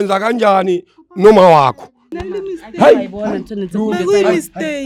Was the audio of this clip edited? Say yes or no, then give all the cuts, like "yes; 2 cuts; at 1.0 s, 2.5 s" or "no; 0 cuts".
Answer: no; 0 cuts